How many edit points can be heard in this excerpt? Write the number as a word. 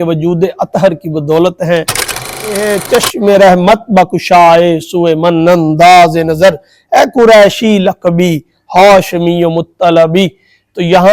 one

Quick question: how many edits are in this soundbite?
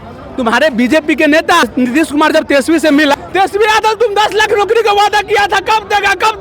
two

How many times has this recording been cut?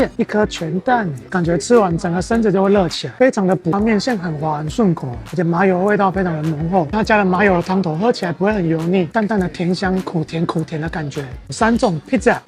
three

